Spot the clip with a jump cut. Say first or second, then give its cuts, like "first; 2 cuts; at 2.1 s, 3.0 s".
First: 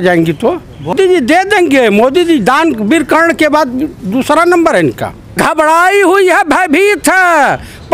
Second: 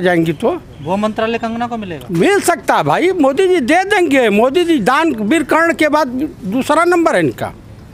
first; 2 cuts; at 0.9 s, 5.3 s